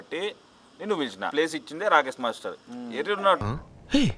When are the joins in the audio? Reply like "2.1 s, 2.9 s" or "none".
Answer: 1.3 s